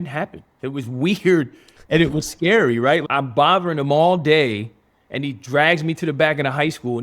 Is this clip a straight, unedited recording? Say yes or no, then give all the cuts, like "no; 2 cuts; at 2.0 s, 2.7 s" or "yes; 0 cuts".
no; 1 cut; at 3.0 s